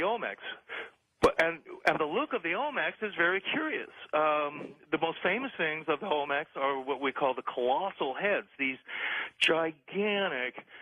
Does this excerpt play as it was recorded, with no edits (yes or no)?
no